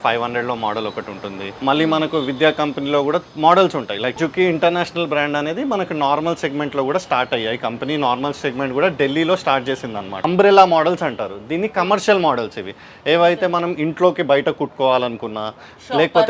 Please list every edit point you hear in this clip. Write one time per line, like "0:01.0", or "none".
0:01.5
0:03.3
0:04.2
0:10.2